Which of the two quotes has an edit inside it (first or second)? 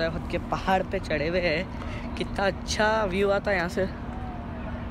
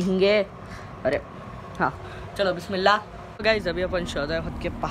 second